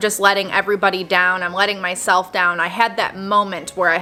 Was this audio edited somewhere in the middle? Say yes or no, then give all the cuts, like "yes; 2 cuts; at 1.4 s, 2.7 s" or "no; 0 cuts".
no; 0 cuts